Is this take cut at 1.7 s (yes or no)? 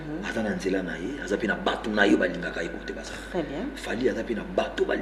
no